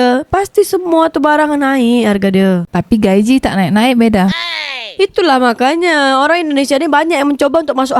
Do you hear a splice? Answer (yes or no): no